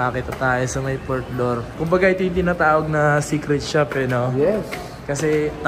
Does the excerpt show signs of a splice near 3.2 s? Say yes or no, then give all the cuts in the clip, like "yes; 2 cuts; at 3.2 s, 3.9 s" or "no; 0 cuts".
no; 0 cuts